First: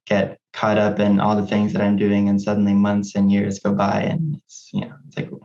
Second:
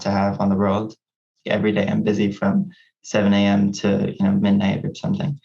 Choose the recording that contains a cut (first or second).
second